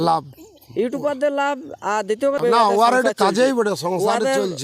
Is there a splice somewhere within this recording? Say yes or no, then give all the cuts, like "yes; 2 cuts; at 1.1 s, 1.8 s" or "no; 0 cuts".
no; 0 cuts